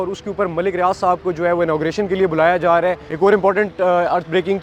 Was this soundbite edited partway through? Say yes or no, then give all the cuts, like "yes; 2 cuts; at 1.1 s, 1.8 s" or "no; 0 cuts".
yes; 1 cut; at 3.1 s